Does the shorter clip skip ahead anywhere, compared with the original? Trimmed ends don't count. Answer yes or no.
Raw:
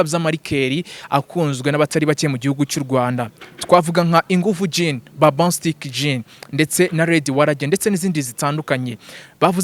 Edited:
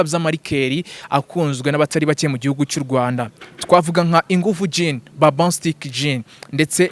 no